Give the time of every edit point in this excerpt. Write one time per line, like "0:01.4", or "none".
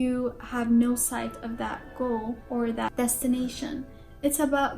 0:02.8